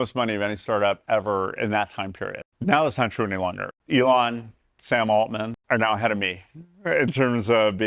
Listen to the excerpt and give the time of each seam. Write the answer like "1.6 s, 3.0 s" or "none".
2.5 s, 3.7 s, 5.6 s